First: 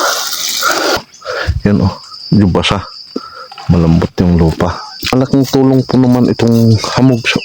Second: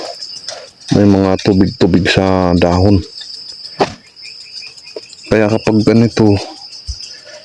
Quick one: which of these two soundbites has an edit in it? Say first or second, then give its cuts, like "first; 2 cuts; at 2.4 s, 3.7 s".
first; 2 cuts; at 1.0 s, 5.1 s